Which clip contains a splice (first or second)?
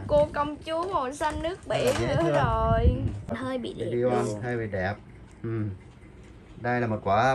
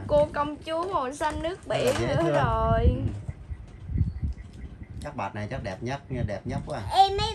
first